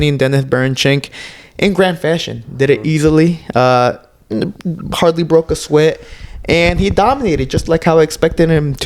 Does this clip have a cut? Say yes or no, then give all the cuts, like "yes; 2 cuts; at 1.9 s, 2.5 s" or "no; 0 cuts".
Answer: no; 0 cuts